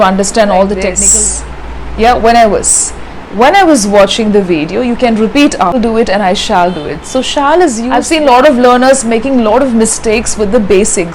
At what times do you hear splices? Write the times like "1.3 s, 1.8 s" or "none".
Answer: 1.0 s, 5.8 s, 7.9 s